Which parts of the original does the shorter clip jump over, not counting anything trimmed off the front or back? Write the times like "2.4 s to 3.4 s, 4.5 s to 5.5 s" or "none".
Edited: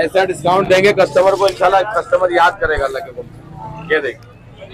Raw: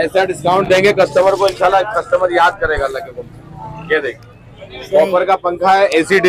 none